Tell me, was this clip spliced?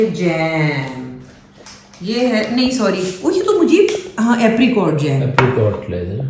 no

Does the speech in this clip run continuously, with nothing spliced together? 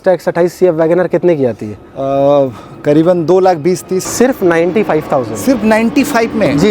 no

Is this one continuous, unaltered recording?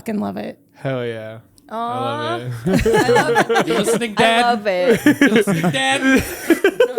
yes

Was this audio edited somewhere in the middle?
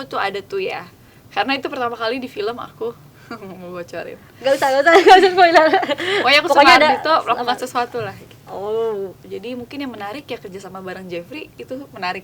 yes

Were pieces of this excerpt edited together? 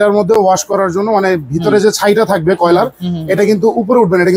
no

